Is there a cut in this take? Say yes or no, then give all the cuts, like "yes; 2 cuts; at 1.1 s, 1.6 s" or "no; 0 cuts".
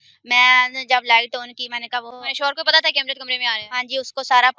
yes; 1 cut; at 2.2 s